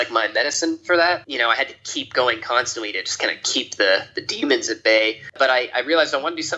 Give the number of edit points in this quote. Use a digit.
2